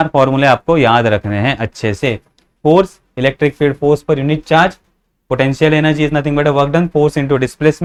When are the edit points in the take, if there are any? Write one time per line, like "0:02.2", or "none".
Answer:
none